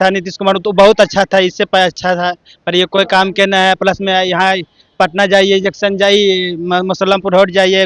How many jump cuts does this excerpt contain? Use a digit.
0